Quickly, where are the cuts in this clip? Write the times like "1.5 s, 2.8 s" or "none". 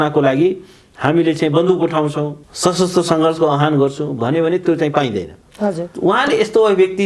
2.4 s, 5.9 s

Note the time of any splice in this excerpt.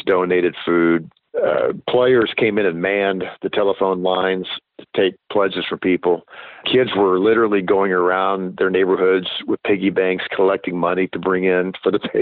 1.2 s, 6.6 s

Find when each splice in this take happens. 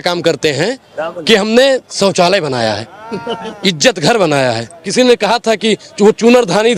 4.7 s

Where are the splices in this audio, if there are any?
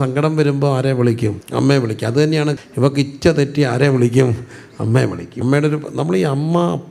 1.4 s, 2.5 s, 5.3 s

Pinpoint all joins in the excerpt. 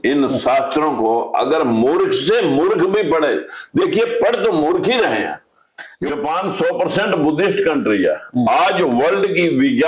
6.1 s

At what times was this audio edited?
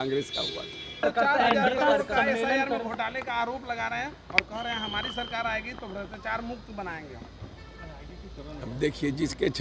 1.0 s

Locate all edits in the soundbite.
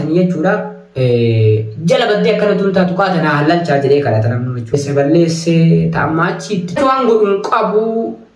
4.7 s, 6.8 s

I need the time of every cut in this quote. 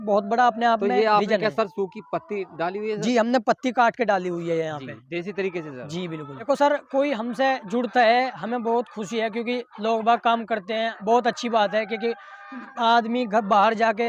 6.4 s

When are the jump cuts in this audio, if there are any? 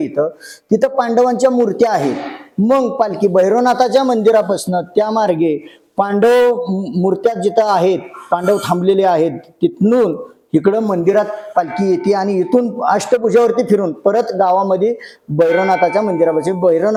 none

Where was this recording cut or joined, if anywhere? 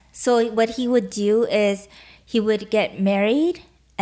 none

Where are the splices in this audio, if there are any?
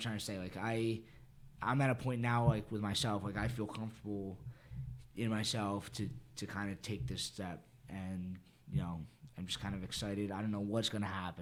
none

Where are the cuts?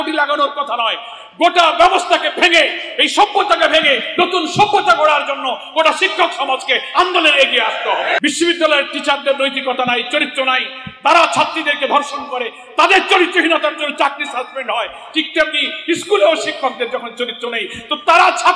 8.2 s

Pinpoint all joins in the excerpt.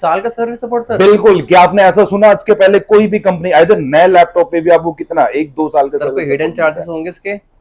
none

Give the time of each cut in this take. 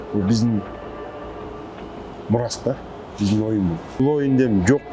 4.0 s

